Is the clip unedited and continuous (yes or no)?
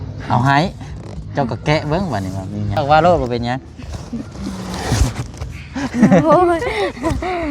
no